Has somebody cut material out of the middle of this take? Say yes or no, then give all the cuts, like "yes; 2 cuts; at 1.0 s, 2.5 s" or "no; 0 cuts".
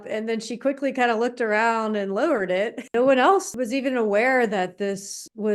yes; 2 cuts; at 2.9 s, 3.5 s